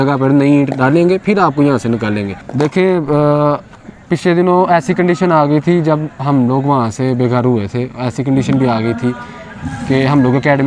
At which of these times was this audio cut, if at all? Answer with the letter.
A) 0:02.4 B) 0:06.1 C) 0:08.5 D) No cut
A